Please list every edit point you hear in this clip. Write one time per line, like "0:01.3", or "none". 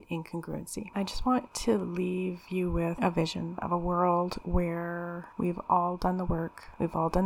0:00.9
0:03.6